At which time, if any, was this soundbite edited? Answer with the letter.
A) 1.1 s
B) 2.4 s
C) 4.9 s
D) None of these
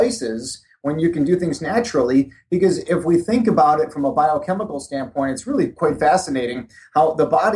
D